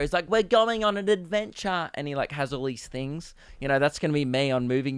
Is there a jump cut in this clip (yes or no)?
no